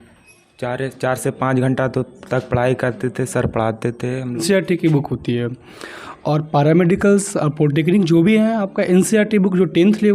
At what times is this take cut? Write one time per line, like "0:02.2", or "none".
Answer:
0:04.4